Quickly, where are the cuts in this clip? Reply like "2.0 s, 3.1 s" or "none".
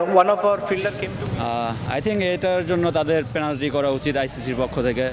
1.0 s

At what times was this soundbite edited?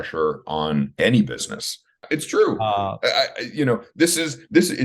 0.9 s, 2.0 s

